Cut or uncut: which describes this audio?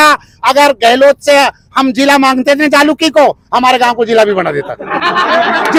uncut